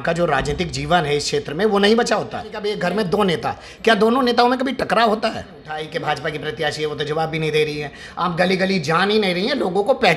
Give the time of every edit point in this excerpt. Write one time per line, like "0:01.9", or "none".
0:02.7
0:05.8